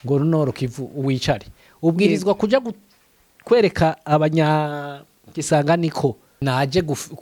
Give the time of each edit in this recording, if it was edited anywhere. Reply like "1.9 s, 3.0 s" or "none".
6.3 s